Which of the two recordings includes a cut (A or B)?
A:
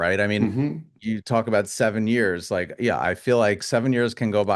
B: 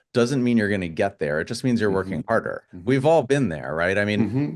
B